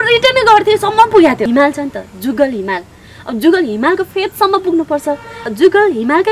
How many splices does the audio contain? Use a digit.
2